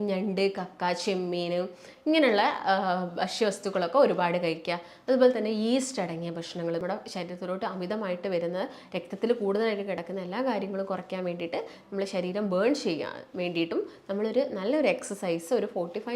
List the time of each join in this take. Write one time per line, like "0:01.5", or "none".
0:06.8